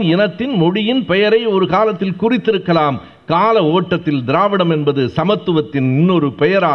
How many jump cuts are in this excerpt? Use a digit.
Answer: 0